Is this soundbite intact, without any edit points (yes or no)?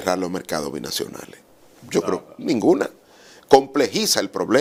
yes